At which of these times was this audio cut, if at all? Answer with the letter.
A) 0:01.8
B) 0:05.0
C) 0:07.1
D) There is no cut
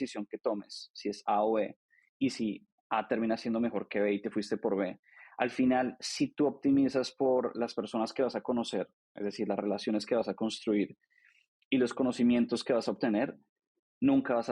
D